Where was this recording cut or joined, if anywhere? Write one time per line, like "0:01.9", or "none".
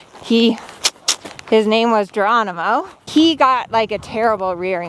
0:03.1